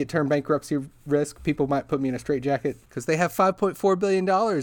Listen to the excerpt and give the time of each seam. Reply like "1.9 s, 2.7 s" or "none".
2.9 s